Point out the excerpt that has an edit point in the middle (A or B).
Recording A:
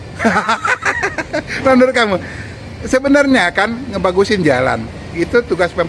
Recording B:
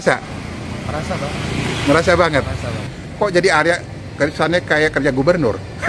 B